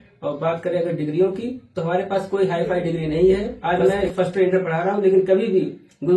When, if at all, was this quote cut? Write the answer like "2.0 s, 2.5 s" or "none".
3.5 s